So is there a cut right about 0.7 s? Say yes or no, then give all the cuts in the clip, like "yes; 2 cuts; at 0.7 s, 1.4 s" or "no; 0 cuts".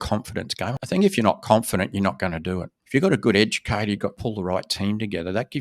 yes; 3 cuts; at 0.7 s, 2.7 s, 4.2 s